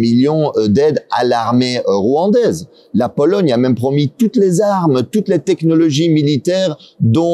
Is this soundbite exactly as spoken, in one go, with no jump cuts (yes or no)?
yes